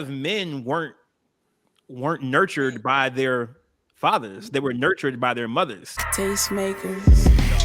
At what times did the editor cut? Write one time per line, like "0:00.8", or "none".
0:06.1